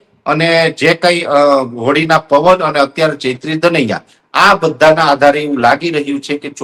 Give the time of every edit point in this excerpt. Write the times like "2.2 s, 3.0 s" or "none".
none